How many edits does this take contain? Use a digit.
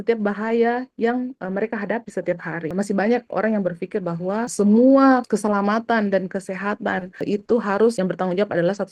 5